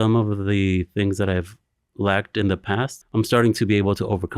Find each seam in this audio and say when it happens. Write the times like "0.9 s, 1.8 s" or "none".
3.0 s